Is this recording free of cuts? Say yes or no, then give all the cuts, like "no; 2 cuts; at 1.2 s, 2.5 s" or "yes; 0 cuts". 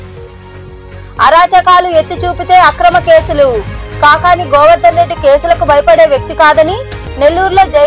no; 1 cut; at 0.9 s